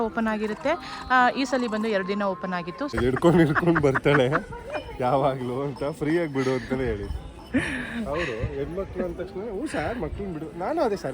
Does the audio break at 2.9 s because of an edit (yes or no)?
yes